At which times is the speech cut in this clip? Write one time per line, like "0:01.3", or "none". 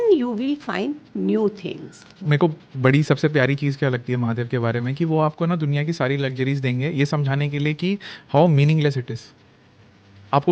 0:02.2